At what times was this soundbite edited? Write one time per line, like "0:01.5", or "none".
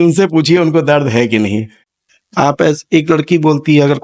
0:01.8